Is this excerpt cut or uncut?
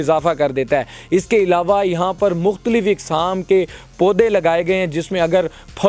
uncut